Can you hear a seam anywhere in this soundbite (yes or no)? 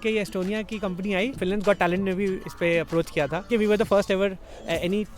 yes